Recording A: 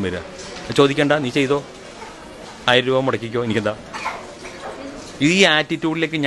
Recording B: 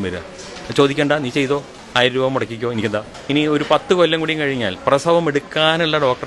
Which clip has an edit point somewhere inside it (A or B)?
B